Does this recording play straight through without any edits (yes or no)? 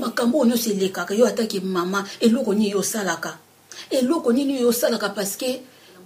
yes